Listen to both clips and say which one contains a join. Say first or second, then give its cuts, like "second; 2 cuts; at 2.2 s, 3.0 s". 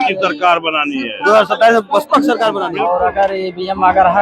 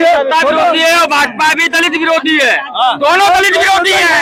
first; 1 cut; at 2.7 s